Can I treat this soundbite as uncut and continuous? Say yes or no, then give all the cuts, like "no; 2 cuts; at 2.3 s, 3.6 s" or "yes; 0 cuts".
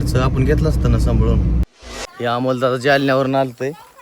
no; 1 cut; at 1.8 s